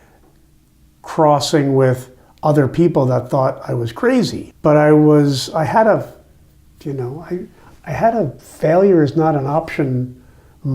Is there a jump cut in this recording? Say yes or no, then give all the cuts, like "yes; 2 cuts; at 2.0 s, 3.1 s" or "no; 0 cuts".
yes; 1 cut; at 4.4 s